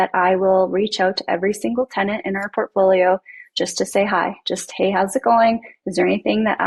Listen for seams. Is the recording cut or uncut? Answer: uncut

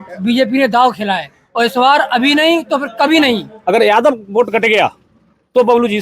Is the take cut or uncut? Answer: cut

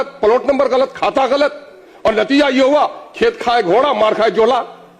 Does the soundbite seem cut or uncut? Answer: uncut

